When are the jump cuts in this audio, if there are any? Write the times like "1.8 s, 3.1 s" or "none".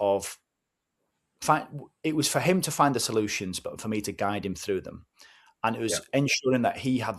none